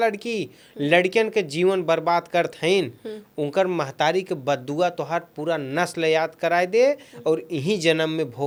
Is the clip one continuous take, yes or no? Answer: yes